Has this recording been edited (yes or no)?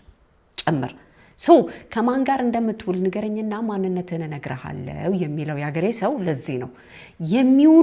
no